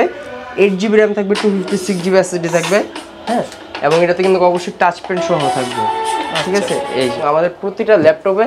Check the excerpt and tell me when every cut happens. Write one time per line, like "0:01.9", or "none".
0:07.2